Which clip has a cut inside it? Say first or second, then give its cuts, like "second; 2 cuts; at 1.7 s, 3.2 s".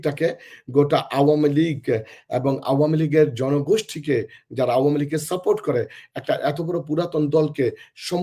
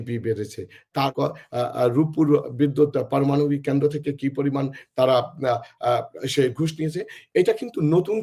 second; 1 cut; at 1.1 s